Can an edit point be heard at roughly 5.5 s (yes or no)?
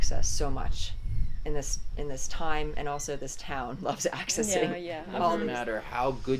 yes